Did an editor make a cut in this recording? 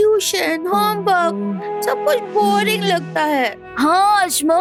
no; 0 cuts

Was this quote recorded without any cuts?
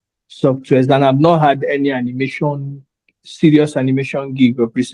yes; 0 cuts

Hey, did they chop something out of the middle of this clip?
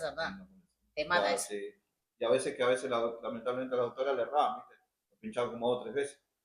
no; 0 cuts

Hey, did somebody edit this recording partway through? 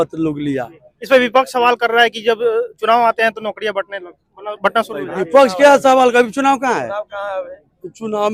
no; 0 cuts

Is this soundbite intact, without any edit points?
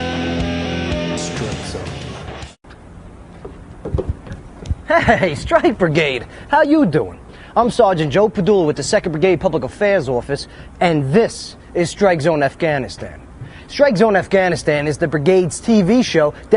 no; 1 cut; at 9.7 s

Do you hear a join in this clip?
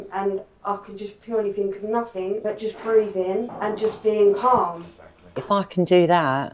yes; 3 cuts; at 2.4 s, 3.5 s, 5.4 s

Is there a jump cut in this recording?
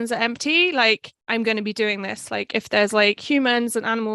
yes; 1 cut; at 1.1 s

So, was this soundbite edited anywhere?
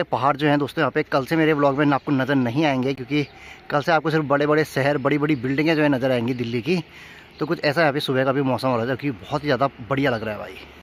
no; 0 cuts

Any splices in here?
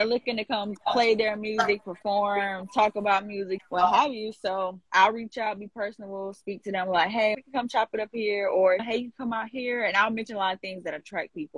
no; 0 cuts

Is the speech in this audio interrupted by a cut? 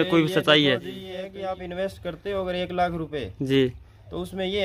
yes; 1 cut; at 1.2 s

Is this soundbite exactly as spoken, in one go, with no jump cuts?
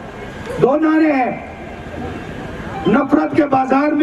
yes; 0 cuts

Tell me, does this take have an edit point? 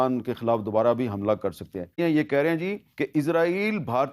yes; 1 cut; at 2.0 s

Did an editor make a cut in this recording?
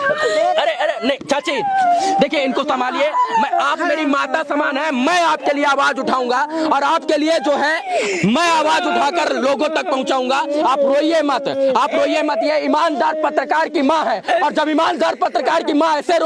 no; 0 cuts

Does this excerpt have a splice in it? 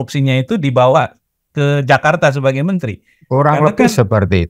no; 0 cuts

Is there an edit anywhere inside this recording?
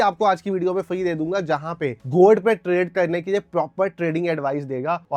no; 0 cuts

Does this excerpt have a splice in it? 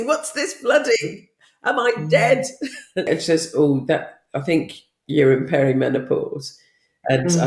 yes; 1 cut; at 3.1 s

